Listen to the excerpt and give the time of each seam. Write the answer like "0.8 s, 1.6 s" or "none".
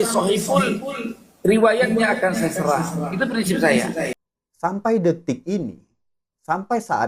4.1 s